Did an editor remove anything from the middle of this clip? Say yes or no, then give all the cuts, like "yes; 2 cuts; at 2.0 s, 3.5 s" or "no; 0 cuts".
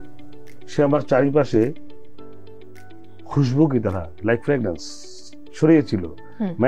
no; 0 cuts